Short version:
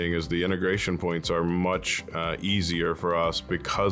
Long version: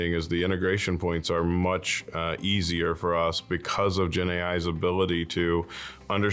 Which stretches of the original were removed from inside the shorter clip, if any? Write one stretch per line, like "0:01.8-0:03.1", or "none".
none

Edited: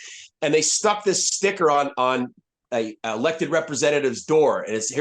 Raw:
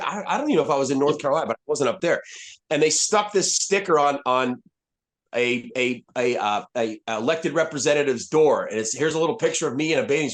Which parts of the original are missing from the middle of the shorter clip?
0:04.9-0:06.7

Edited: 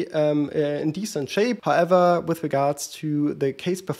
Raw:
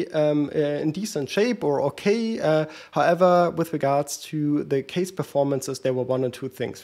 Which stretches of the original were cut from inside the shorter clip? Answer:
0:01.6-0:02.9

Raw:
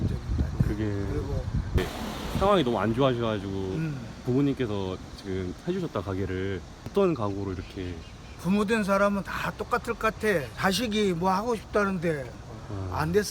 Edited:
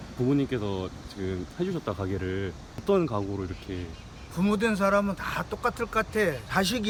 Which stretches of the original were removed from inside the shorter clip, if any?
none

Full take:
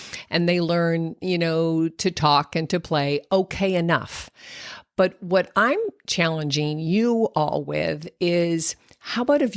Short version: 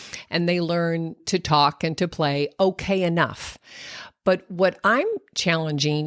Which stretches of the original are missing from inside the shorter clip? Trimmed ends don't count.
0:01.2-0:01.9

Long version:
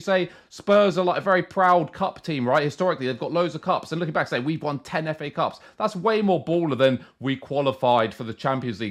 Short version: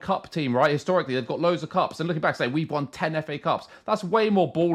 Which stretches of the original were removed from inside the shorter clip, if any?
none

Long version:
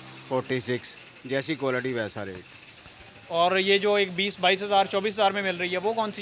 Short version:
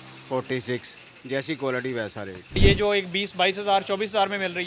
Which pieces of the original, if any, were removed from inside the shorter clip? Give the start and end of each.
0:02.6-0:03.6

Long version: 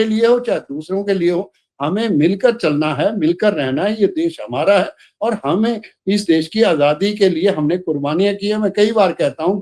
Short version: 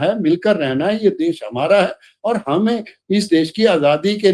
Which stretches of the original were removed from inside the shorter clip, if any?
none

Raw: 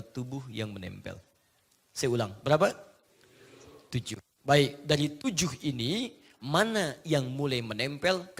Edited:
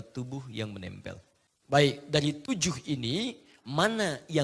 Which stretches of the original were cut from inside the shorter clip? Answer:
0:01.6-0:04.3

